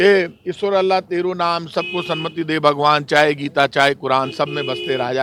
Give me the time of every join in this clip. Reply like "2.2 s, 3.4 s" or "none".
none